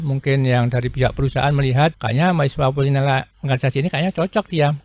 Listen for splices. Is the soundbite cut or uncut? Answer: cut